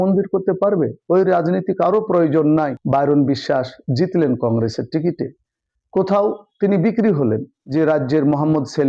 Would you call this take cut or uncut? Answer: cut